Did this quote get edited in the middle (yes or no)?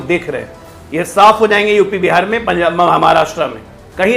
no